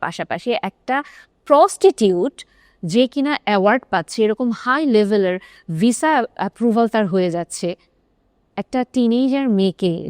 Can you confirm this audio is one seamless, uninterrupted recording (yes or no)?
yes